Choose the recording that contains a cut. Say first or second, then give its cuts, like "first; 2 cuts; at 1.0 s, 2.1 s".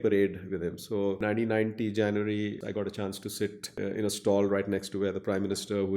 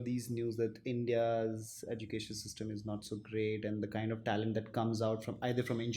first; 3 cuts; at 1.2 s, 2.6 s, 3.7 s